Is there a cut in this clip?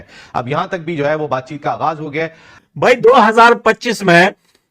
yes; 1 cut; at 2.7 s

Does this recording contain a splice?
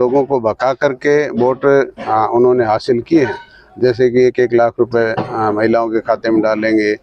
no; 0 cuts

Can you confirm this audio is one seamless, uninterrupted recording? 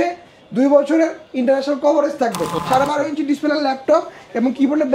no; 1 cut; at 2.5 s

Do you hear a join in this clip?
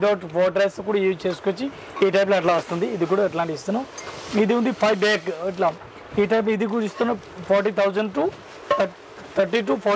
no; 0 cuts

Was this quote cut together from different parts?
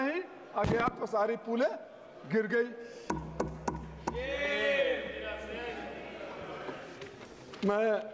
no; 0 cuts

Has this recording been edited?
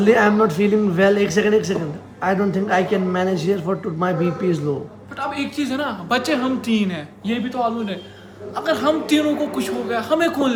no; 0 cuts

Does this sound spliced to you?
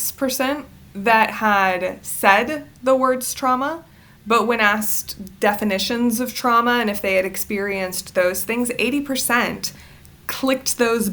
no; 0 cuts

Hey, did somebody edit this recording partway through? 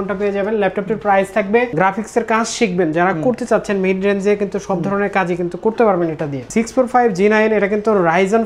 yes; 2 cuts; at 1.7 s, 6.4 s

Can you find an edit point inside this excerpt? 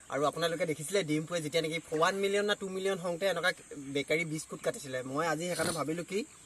yes; 1 cut; at 1.8 s

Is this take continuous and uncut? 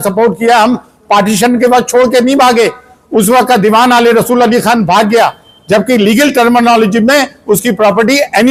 yes; 0 cuts

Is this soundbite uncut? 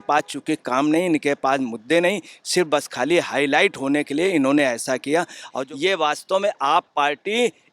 no; 1 cut; at 5.6 s

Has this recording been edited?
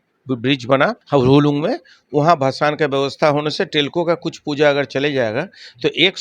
yes; 1 cut; at 1.0 s

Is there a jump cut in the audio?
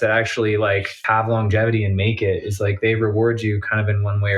yes; 1 cut; at 0.9 s

